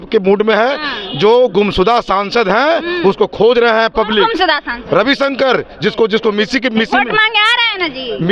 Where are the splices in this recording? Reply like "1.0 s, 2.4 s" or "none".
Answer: none